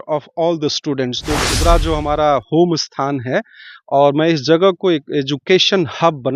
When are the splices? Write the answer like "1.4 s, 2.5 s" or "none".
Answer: 1.3 s